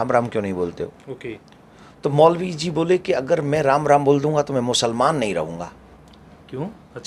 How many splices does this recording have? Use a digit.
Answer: 0